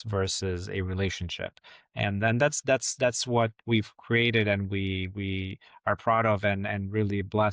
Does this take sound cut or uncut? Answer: uncut